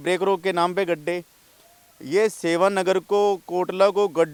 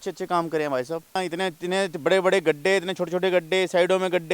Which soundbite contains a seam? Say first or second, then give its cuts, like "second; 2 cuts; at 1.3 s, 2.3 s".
second; 1 cut; at 1.2 s